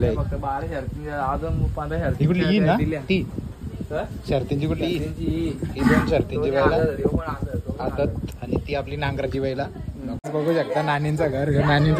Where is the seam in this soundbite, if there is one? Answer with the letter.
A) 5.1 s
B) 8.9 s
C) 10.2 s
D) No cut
C